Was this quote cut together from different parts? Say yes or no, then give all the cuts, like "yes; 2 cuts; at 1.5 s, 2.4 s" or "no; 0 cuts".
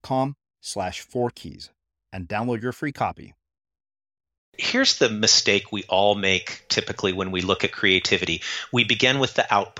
yes; 1 cut; at 4.6 s